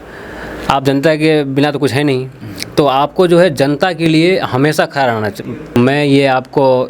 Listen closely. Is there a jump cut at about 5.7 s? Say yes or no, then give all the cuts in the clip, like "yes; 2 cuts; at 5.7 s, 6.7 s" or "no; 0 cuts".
yes; 1 cut; at 5.7 s